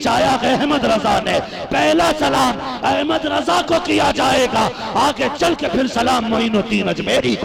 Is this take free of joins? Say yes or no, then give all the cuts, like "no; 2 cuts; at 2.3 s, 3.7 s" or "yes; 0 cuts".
yes; 0 cuts